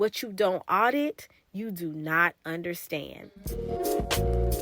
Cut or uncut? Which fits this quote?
cut